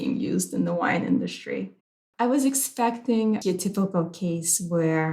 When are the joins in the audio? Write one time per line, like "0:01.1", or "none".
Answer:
0:01.9
0:03.4